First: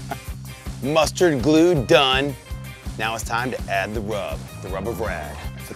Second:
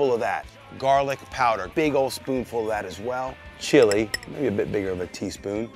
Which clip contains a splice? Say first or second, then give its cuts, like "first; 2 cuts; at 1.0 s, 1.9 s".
second; 1 cut; at 1.4 s